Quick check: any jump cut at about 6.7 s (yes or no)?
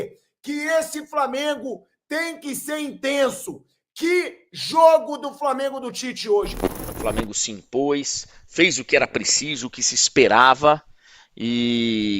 yes